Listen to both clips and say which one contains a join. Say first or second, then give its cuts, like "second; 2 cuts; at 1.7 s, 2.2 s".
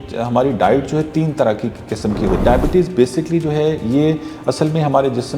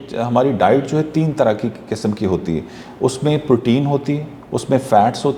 first; 1 cut; at 2.4 s